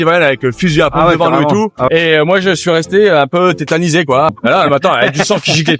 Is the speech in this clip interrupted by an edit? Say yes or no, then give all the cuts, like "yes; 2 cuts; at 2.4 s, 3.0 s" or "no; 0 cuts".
yes; 2 cuts; at 1.9 s, 4.3 s